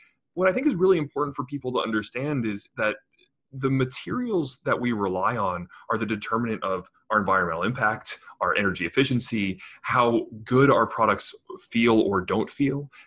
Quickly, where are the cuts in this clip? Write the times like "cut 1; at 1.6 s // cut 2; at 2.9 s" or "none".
cut 1; at 2.6 s